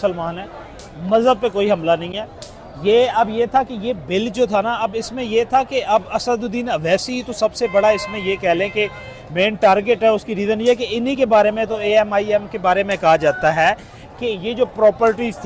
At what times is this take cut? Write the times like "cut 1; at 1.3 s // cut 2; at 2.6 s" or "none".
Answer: none